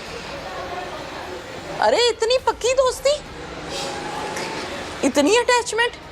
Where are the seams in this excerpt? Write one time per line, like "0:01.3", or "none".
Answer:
none

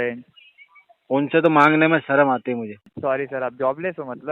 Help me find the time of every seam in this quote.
0:02.8

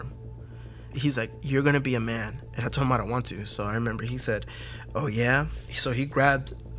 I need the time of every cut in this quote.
0:00.9

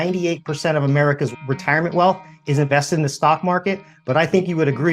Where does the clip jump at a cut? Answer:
0:01.3

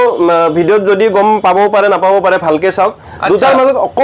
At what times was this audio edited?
none

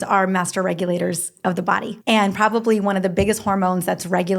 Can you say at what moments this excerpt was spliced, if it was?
0:01.9

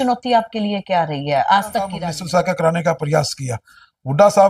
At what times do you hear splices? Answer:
0:02.0

